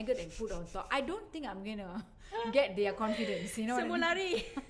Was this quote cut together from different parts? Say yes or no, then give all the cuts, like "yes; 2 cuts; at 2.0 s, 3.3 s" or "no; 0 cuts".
no; 0 cuts